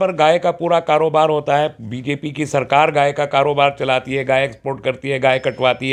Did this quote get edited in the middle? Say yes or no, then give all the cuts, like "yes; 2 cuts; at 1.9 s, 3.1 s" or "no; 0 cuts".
no; 0 cuts